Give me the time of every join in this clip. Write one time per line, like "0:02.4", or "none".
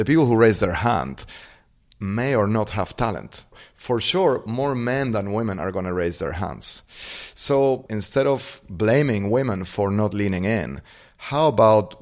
0:03.6
0:07.9

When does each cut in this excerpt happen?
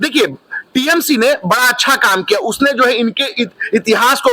none

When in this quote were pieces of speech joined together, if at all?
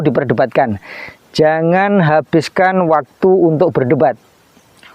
none

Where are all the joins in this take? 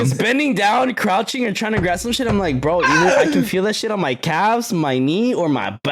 none

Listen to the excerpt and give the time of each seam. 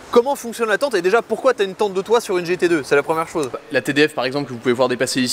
0:03.6

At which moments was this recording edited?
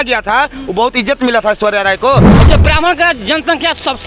0:02.3

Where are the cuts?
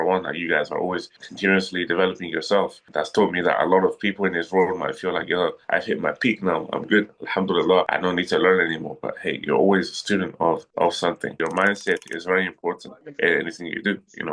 0:07.9
0:11.4

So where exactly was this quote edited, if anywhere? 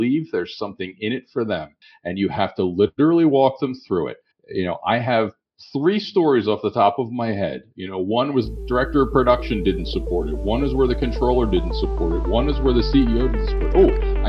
none

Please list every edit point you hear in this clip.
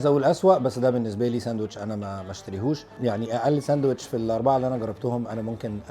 0:02.9

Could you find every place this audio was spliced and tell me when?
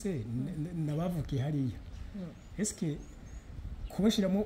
none

